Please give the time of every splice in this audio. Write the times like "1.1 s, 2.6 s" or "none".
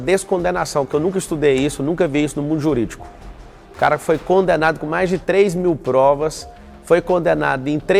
none

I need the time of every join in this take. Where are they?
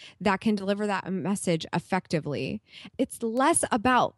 2.9 s

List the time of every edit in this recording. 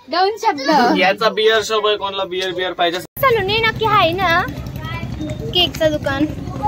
3.2 s

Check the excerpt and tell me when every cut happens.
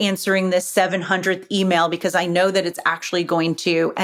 none

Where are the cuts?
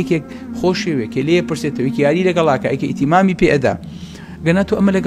none

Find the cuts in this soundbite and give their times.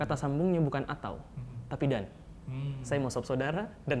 none

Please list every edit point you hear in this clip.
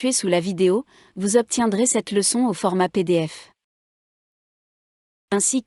none

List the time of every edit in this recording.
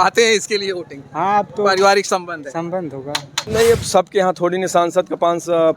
3.4 s

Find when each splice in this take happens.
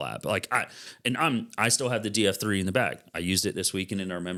none

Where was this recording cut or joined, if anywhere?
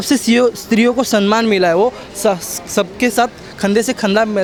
none

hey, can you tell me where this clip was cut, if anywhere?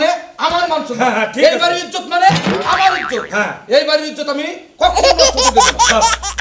none

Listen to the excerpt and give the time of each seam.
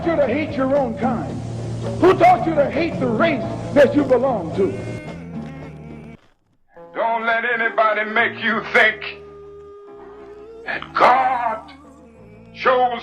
6.1 s

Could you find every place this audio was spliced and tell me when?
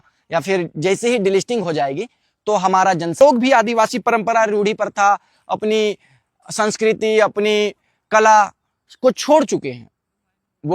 3.2 s

